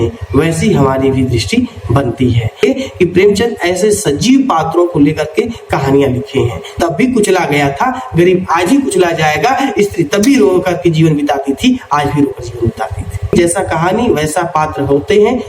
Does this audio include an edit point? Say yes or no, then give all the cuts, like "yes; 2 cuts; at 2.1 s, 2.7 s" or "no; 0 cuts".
yes; 3 cuts; at 2.6 s, 6.8 s, 13.3 s